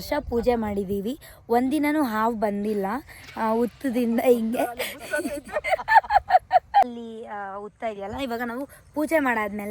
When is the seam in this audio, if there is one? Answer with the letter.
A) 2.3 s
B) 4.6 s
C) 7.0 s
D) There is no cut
C